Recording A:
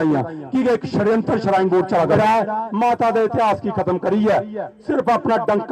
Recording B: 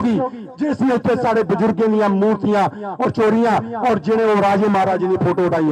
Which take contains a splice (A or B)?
A